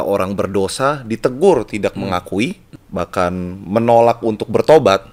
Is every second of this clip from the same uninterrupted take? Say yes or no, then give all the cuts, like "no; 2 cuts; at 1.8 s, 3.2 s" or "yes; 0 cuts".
no; 1 cut; at 2.7 s